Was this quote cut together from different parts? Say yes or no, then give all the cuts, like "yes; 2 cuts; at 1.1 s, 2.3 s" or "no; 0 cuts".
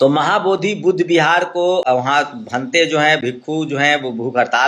yes; 1 cut; at 1.8 s